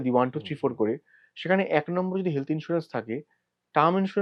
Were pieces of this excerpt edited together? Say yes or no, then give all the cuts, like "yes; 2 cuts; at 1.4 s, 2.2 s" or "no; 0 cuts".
no; 0 cuts